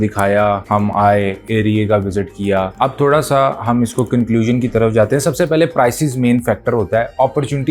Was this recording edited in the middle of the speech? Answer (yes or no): no